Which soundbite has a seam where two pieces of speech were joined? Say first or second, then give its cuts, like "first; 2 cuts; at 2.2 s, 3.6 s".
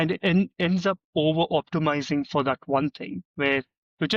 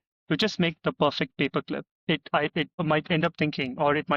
second; 2 cuts; at 1.9 s, 2.8 s